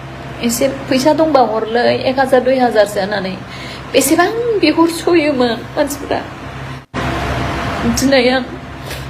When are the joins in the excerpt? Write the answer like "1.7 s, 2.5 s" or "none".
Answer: 6.9 s